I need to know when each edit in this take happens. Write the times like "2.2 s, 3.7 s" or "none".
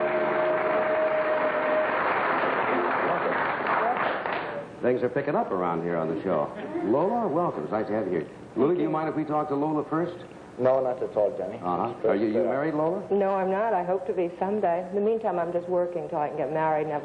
13.7 s